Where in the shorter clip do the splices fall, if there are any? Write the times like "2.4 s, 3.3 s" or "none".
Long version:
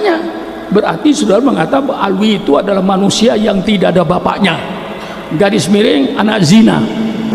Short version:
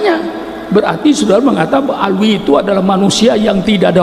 none